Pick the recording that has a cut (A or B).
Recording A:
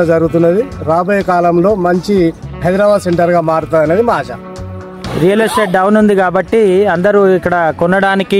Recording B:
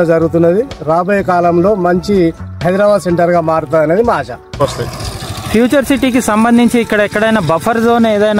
B